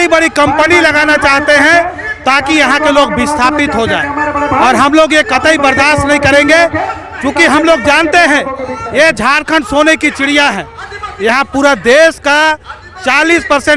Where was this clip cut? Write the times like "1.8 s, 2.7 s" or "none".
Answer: none